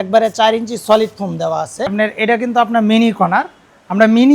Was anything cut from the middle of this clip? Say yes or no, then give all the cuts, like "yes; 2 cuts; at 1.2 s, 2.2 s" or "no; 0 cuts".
yes; 1 cut; at 1.9 s